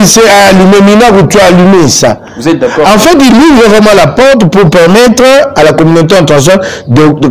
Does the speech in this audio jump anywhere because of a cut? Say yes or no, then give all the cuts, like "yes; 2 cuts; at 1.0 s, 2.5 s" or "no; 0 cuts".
no; 0 cuts